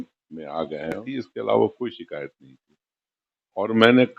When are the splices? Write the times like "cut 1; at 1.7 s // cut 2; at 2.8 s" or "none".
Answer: cut 1; at 1.0 s